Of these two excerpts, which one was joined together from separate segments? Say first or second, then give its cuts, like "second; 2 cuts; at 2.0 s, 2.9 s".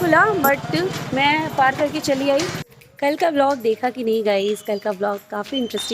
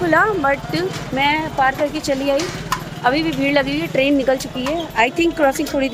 first; 1 cut; at 2.6 s